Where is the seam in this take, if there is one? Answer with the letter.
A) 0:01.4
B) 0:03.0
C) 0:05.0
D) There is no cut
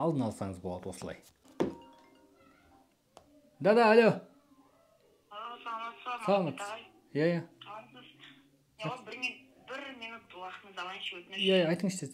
A